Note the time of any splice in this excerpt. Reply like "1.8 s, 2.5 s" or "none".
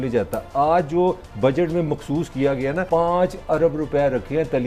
2.9 s